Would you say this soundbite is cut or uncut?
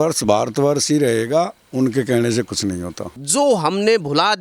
cut